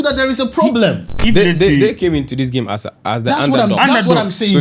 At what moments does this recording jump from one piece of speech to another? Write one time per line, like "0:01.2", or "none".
0:01.1